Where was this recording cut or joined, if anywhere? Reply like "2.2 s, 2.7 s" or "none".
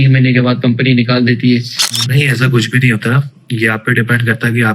2.1 s